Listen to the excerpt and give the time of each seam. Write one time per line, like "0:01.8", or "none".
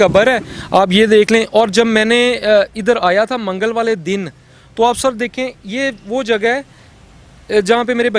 none